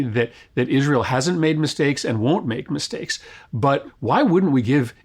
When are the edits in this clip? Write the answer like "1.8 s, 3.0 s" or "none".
3.9 s